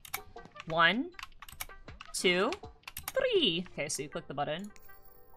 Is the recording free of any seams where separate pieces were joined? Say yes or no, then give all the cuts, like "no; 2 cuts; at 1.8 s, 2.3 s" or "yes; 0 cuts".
no; 1 cut; at 3.7 s